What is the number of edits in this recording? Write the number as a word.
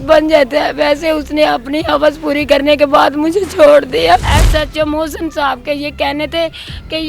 one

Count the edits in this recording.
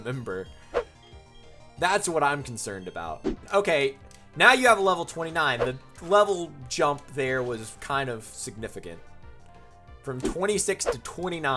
one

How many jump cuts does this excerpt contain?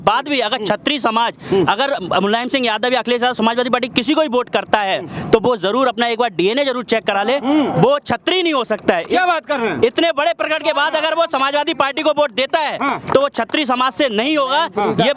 zero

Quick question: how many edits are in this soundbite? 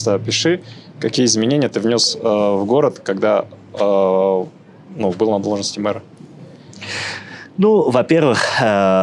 zero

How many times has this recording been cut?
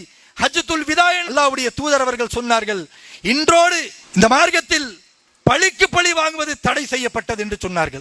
zero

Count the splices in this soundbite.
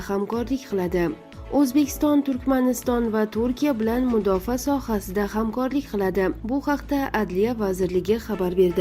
zero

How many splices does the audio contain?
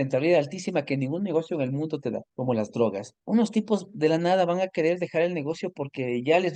two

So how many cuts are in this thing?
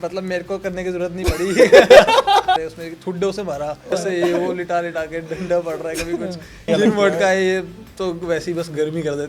three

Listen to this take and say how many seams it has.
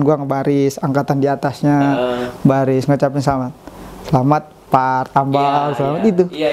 zero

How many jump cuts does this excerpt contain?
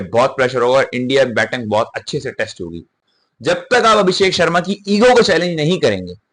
one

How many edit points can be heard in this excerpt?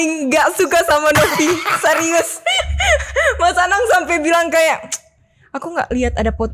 zero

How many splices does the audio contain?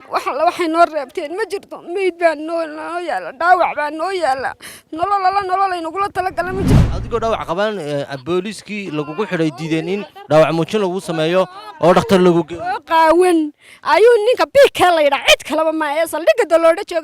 one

